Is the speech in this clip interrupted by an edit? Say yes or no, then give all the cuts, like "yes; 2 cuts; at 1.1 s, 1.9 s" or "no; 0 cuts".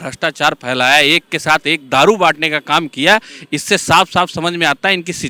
no; 0 cuts